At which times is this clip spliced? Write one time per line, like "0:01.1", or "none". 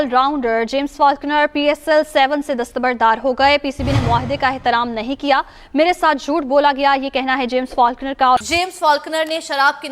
0:08.5